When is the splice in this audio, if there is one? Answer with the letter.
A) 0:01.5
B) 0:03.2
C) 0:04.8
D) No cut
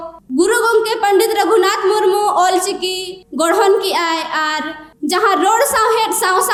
D